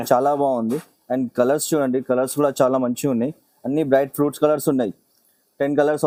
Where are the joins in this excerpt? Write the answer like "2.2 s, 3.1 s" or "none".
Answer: none